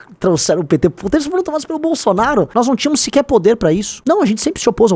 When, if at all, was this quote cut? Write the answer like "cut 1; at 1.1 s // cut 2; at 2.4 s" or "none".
cut 1; at 2.5 s // cut 2; at 3.9 s